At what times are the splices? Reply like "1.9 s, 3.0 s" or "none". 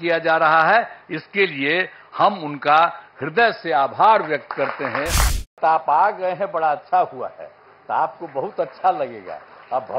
5.6 s